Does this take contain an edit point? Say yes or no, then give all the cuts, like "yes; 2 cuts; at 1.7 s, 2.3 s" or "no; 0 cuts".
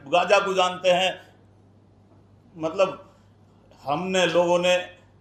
no; 0 cuts